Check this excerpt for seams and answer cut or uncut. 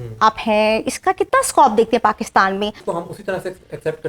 cut